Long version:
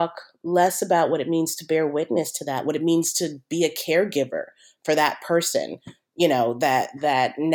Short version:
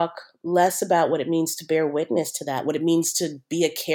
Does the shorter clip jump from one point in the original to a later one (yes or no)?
no